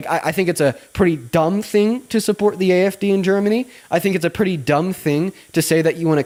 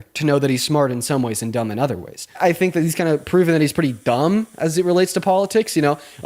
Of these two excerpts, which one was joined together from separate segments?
second; 1 cut; at 2.4 s

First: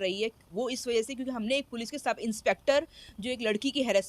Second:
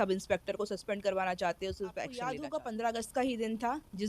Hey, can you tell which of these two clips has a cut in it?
second; 1 cut; at 2.4 s

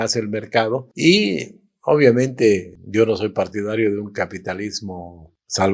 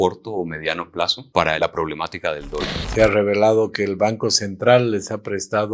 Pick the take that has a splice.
second; 2 cuts; at 1.2 s, 2.7 s

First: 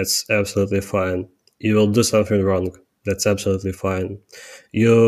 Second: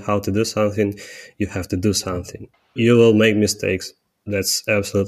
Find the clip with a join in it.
second; 1 cut; at 2.7 s

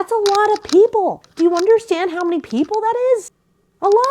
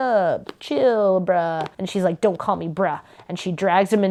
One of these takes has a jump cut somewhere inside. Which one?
first; 1 cut; at 1.2 s

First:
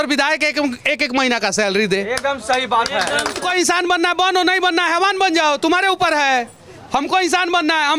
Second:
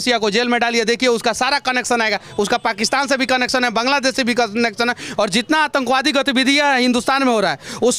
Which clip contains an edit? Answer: first; 1 cut; at 3.5 s

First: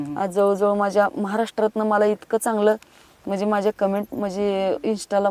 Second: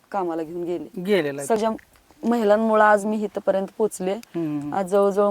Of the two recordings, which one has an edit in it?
second; 1 cut; at 1.6 s

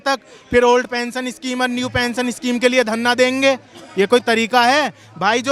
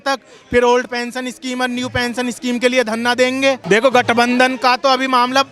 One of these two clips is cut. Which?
second; 1 cut; at 3.6 s

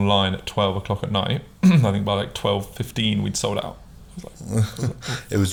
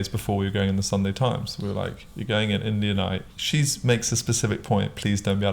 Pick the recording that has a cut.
second; 1 cut; at 3.3 s

